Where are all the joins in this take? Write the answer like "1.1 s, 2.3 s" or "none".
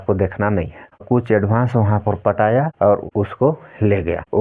1.0 s